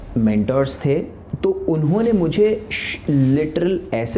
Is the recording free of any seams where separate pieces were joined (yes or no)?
no